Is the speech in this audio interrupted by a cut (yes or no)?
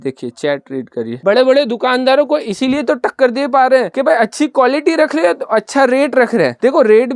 yes